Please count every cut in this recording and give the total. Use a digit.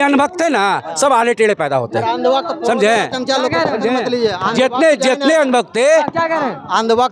0